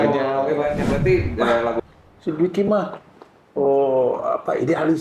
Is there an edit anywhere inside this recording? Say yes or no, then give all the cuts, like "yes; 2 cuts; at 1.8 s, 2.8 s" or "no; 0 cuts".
yes; 1 cut; at 1.8 s